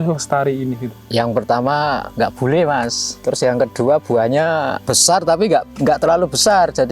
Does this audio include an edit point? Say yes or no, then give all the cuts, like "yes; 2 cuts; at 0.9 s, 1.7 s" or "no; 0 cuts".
yes; 4 cuts; at 0.9 s, 2.1 s, 3.1 s, 4.9 s